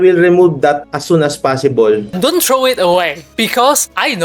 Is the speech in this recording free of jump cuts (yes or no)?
no